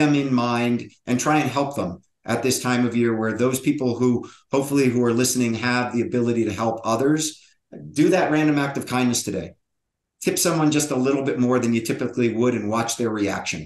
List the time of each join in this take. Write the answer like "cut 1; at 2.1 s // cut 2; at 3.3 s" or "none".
none